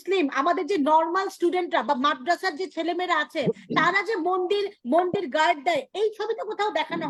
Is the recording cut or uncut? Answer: uncut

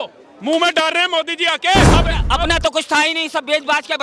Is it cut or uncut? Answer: cut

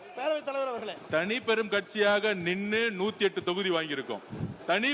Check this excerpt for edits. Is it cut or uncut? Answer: cut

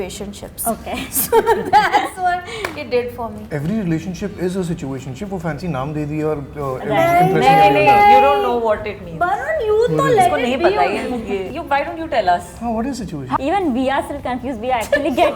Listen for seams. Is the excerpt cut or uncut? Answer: cut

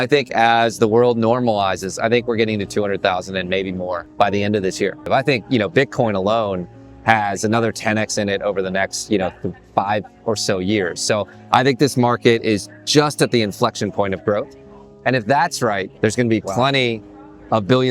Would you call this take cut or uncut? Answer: cut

